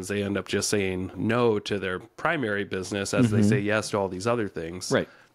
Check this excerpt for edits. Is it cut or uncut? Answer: cut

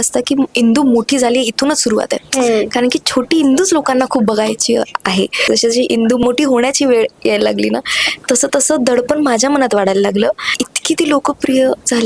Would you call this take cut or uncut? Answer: cut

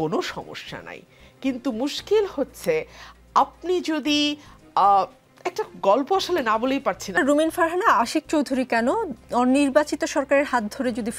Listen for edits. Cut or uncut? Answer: cut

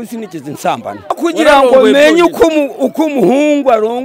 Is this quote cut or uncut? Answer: cut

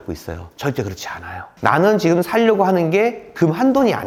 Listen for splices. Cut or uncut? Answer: uncut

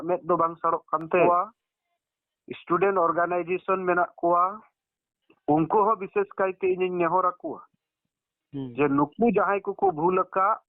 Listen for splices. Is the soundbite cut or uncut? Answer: cut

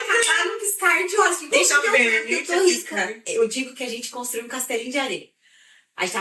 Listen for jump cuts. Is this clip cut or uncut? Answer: cut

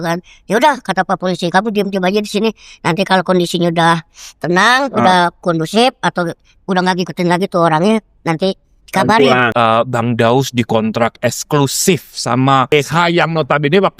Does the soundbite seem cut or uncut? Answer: cut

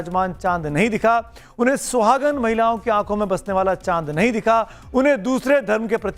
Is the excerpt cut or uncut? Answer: uncut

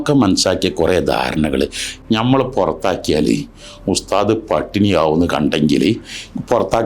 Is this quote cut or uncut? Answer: cut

